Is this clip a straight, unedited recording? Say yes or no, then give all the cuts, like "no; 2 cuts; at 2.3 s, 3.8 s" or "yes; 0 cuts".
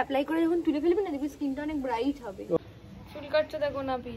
no; 1 cut; at 2.6 s